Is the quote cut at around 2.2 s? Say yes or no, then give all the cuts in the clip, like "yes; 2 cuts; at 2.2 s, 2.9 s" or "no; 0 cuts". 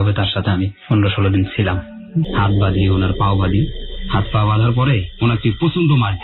yes; 1 cut; at 2.2 s